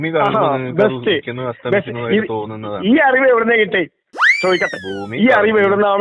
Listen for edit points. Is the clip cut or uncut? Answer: uncut